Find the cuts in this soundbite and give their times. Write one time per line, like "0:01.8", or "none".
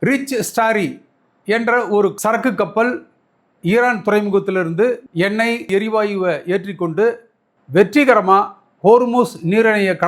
0:05.7